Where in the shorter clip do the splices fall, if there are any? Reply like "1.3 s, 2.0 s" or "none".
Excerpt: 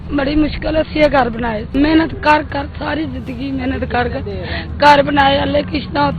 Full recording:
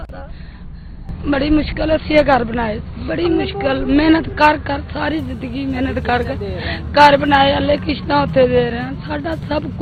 1.7 s